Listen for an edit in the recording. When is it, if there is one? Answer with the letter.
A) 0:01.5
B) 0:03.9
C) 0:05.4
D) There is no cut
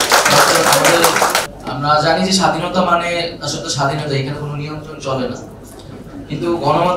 A